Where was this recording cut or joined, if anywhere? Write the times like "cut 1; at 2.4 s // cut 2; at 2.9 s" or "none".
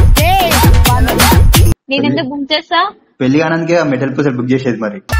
cut 1; at 1.7 s